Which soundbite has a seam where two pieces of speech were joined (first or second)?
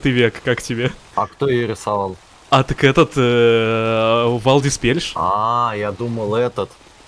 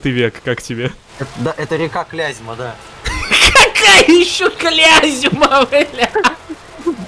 second